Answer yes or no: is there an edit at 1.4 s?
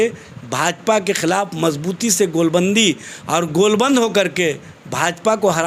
no